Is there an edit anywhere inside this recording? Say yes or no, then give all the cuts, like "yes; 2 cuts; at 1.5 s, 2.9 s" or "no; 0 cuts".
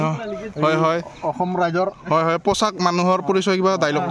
no; 0 cuts